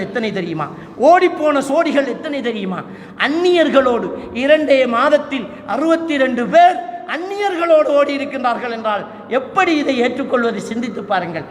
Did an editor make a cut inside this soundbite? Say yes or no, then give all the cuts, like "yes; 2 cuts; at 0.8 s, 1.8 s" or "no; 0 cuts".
no; 0 cuts